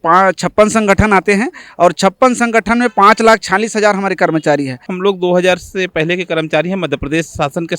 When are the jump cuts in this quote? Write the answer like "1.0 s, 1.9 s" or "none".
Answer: 4.9 s